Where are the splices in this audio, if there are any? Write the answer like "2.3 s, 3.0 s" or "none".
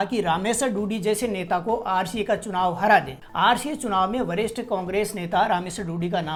none